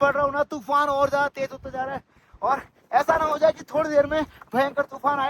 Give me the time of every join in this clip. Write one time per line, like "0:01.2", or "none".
none